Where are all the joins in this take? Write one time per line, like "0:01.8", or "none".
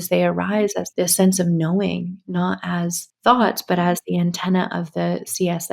0:00.8
0:03.0